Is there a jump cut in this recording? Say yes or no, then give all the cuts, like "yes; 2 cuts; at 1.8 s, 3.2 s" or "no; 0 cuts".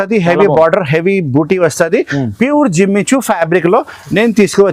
no; 0 cuts